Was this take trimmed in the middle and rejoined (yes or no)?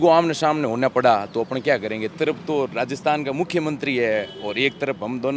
yes